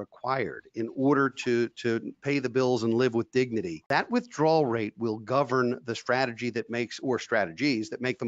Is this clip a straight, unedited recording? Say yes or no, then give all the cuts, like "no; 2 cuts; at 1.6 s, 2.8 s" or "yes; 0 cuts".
no; 1 cut; at 3.8 s